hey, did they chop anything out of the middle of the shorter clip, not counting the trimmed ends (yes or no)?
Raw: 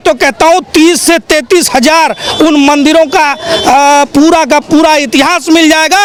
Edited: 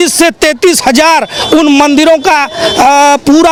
no